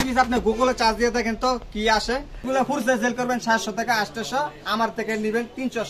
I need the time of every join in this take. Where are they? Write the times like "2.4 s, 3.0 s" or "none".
2.5 s

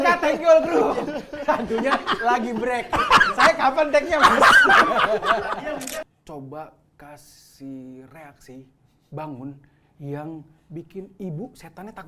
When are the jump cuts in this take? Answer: 6.0 s

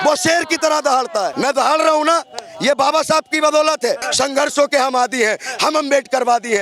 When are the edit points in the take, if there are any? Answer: 1.3 s, 4.1 s

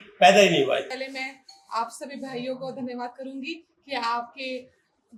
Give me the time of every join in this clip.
none

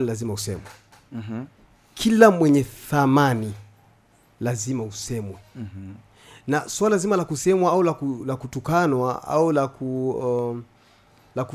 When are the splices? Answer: none

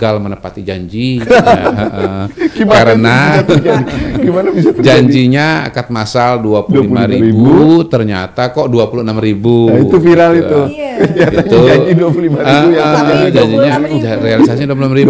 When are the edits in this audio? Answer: none

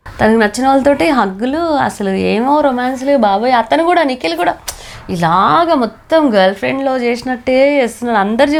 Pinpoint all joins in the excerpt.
none

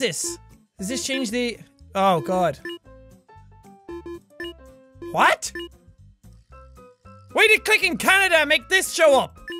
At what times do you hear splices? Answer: none

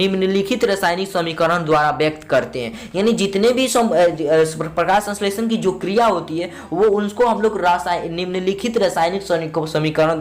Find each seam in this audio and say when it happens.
none

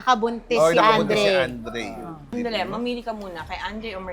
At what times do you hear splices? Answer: 2.2 s

